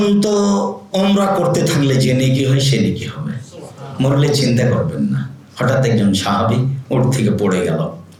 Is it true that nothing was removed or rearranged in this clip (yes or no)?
yes